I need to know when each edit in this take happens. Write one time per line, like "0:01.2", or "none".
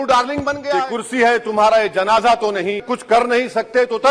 0:01.0
0:02.9